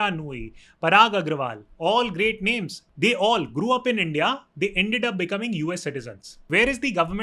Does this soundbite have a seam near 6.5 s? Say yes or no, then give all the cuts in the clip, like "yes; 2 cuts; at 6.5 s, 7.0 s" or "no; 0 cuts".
yes; 2 cuts; at 2.8 s, 6.5 s